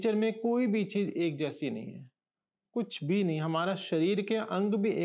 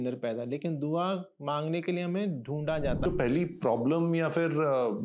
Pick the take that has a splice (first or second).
second